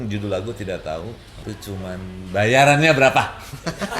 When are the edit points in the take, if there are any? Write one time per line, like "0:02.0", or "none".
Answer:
0:01.5